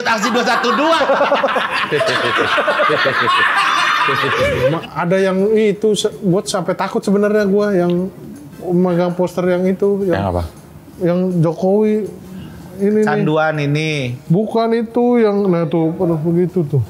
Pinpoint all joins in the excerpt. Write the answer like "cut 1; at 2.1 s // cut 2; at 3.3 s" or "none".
cut 1; at 4.8 s